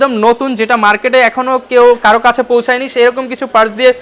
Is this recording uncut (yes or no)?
yes